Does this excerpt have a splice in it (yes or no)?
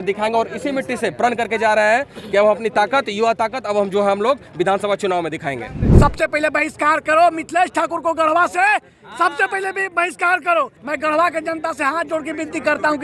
yes